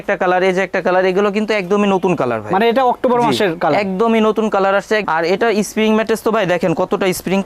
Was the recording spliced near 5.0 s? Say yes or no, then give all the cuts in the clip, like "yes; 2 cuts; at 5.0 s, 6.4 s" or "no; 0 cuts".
yes; 1 cut; at 5.0 s